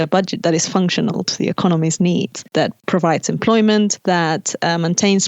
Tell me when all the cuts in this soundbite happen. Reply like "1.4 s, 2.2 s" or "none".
2.5 s, 4.0 s